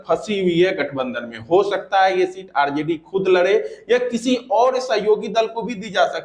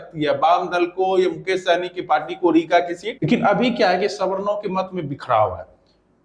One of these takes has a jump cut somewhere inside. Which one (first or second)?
second